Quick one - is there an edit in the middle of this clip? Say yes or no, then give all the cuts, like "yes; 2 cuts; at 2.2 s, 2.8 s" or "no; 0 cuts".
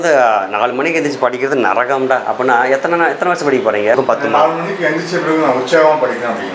yes; 1 cut; at 3.9 s